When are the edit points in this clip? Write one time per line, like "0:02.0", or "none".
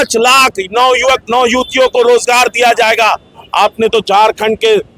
none